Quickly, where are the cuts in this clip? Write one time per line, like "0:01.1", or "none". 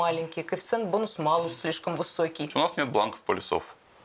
0:02.5